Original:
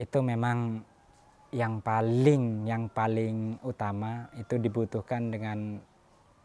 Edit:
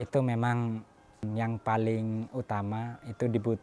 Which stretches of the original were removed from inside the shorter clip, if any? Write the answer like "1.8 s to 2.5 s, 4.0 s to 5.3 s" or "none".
1.3 s to 2.6 s